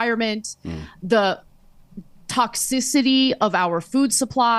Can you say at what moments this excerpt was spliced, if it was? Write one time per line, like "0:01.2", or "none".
none